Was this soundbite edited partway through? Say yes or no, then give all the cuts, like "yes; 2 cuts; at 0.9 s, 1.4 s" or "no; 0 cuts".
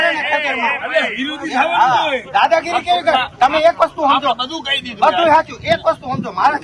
yes; 1 cut; at 2.2 s